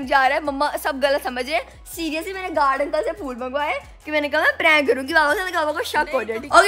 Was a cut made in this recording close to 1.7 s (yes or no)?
no